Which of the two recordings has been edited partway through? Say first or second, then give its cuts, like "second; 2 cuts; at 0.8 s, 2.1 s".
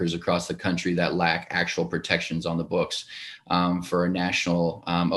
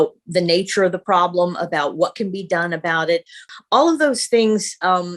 second; 1 cut; at 3.5 s